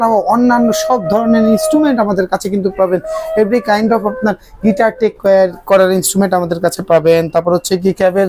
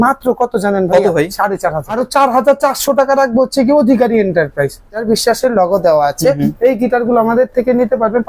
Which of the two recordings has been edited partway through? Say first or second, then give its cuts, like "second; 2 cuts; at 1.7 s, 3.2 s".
second; 2 cuts; at 2.0 s, 5.0 s